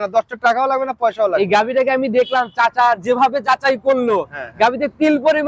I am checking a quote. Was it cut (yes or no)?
no